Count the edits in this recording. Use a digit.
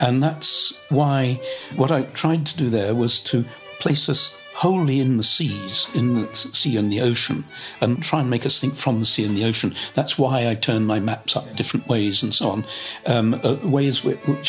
2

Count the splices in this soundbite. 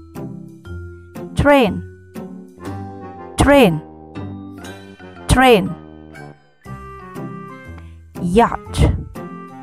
4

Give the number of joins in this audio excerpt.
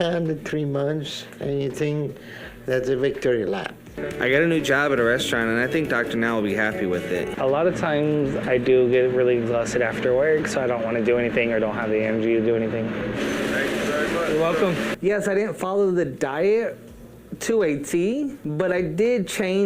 4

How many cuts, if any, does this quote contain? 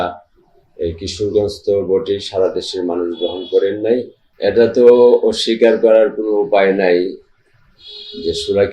1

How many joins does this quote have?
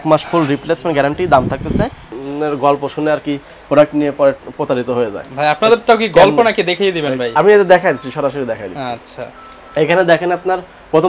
1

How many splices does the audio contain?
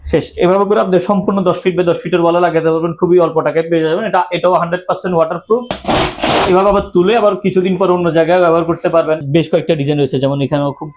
2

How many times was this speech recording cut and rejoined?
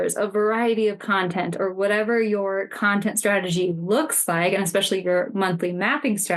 0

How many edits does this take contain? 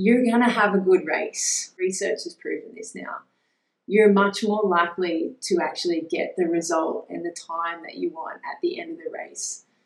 1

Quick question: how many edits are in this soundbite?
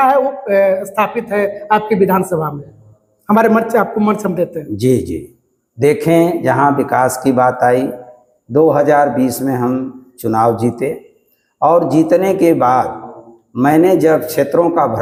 0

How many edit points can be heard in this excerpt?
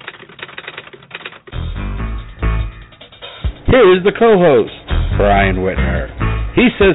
0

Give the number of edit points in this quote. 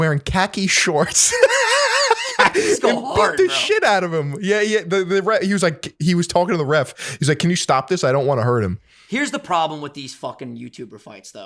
0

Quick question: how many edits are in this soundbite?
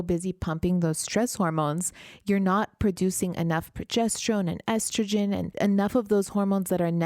1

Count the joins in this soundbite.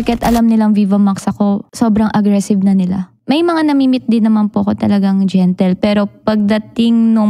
2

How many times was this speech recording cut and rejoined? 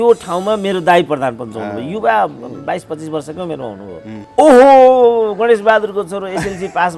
1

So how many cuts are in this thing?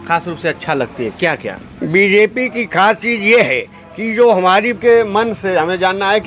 1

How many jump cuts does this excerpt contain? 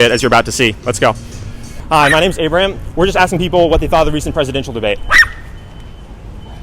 1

